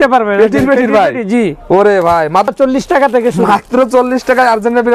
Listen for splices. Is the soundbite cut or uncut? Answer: cut